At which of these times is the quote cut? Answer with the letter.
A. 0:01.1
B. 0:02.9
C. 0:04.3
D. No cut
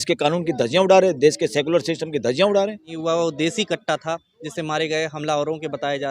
B